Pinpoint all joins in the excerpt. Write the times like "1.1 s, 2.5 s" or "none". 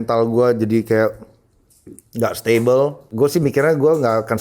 3.0 s